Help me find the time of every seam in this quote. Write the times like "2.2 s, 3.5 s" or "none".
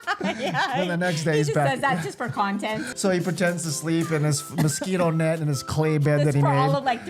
2.9 s